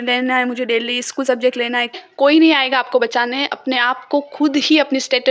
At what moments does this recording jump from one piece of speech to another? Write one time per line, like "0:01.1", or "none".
0:02.0